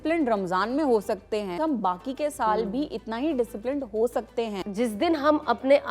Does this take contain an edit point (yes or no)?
yes